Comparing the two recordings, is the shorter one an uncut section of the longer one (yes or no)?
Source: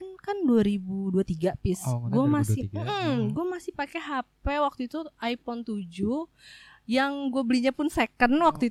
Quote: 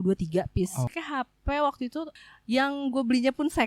no